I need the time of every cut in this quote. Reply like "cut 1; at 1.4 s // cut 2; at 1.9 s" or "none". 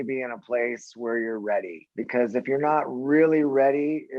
cut 1; at 1.8 s